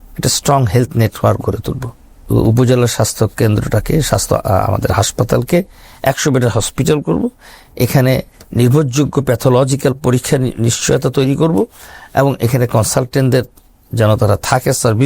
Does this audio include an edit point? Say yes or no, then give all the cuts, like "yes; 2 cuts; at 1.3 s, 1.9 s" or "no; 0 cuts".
yes; 1 cut; at 2.2 s